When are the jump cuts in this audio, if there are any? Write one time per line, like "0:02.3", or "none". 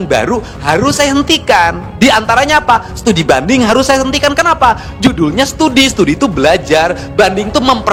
none